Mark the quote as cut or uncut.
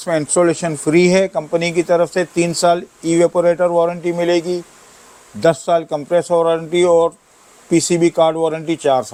uncut